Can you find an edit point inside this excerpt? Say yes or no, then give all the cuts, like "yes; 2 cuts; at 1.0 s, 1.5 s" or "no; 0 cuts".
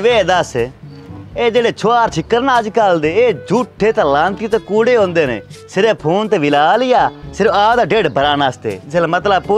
no; 0 cuts